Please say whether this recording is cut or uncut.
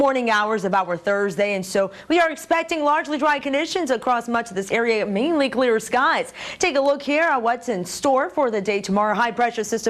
cut